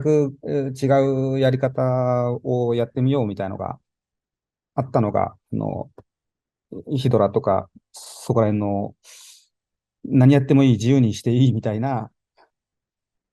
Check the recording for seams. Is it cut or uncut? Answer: uncut